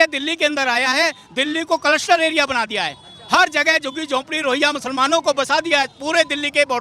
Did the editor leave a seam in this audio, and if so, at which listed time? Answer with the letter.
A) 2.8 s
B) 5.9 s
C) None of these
C